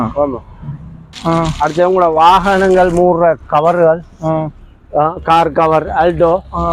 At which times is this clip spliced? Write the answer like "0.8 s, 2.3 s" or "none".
1.2 s